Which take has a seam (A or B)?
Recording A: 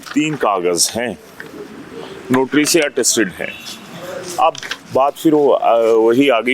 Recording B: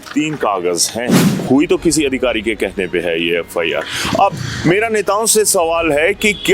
B